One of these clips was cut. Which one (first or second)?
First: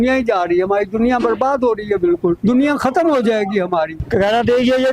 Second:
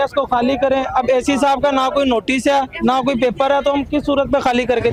first